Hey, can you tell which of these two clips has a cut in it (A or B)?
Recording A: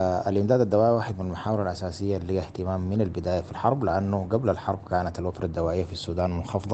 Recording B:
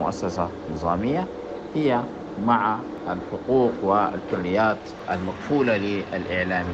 B